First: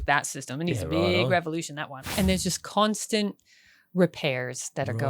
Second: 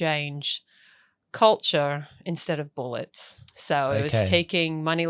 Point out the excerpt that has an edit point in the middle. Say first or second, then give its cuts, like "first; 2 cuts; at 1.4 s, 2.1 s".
first; 1 cut; at 1.9 s